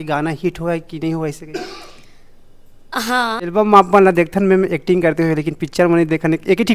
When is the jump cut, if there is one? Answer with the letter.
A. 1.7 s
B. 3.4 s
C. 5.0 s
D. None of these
B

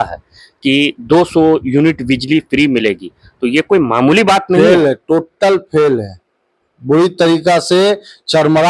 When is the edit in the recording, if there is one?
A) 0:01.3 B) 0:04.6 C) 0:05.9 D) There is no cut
B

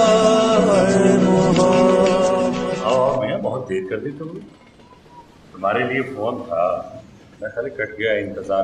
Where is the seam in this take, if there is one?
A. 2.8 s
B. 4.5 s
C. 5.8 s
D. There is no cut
A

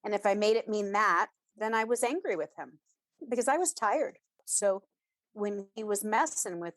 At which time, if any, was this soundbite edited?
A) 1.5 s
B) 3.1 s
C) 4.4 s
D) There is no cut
C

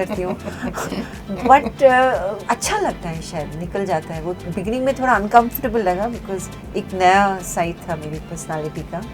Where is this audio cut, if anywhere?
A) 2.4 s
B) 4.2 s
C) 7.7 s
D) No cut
A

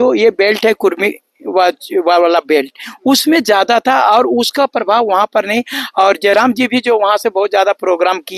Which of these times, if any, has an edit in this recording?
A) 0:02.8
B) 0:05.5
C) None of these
C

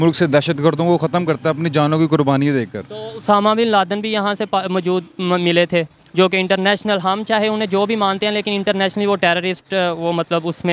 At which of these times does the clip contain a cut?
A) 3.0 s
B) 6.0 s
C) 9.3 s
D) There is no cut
D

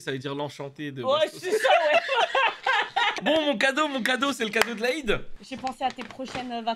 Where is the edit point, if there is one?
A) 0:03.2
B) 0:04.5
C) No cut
C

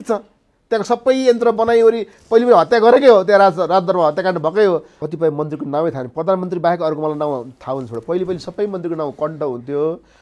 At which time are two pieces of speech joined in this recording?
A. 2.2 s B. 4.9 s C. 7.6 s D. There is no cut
B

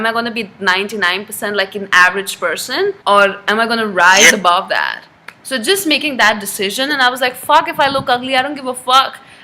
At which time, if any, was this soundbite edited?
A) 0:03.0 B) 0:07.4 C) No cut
A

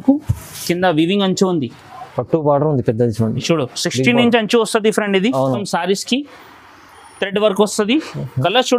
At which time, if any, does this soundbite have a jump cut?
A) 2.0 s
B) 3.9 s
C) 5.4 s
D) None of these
C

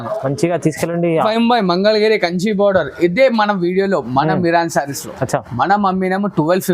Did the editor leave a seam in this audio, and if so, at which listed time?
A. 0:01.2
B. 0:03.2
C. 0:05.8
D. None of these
A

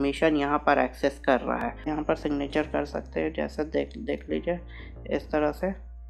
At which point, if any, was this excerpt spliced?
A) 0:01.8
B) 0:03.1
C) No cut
A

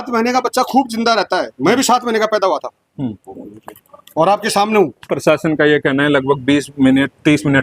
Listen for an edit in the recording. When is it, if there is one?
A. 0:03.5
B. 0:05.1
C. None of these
B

